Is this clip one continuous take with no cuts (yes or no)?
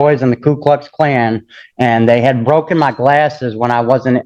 yes